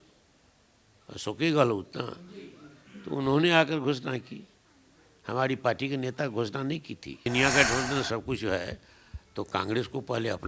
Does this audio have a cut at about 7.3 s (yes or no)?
yes